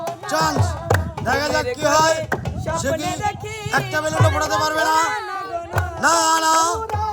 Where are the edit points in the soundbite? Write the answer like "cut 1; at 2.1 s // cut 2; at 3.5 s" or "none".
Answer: none